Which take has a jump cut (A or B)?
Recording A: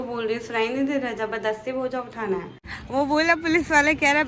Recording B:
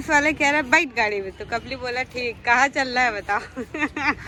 A